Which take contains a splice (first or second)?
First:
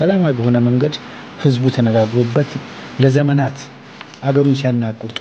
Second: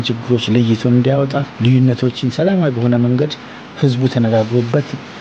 second